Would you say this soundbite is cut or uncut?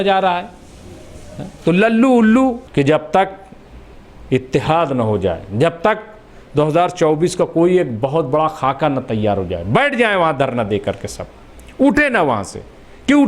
cut